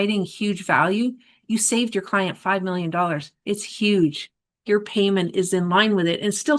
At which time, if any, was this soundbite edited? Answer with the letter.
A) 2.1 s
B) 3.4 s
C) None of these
C